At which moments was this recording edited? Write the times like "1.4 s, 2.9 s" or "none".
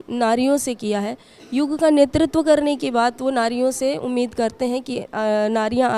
none